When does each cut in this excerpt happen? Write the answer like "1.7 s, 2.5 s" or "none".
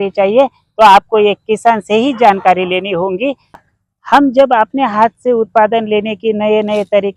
3.5 s